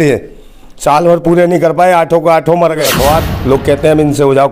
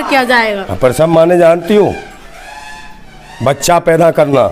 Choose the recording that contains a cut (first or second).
first